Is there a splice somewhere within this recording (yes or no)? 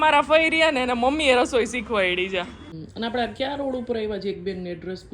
yes